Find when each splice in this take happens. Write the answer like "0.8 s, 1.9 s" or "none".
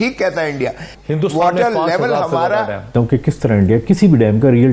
0.9 s, 2.9 s